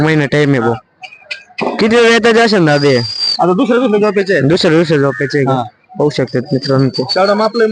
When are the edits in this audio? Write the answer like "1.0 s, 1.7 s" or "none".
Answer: none